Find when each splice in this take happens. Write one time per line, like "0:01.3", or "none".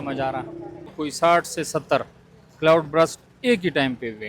0:01.0